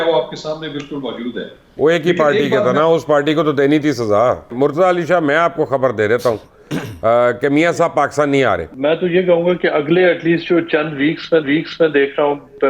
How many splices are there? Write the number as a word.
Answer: two